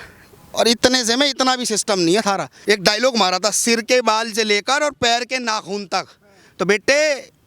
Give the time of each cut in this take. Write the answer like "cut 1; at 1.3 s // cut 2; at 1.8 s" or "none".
cut 1; at 2.5 s